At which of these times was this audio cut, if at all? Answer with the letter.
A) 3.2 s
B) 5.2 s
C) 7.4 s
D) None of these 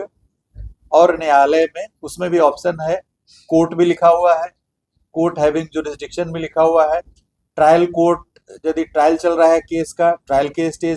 D